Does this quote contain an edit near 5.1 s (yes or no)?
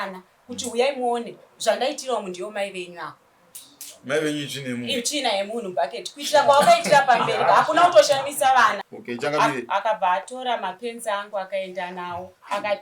no